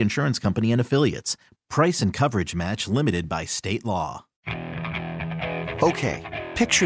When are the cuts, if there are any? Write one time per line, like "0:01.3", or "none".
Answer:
0:04.3